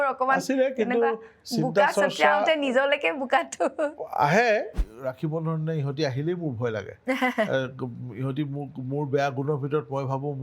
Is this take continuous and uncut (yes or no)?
no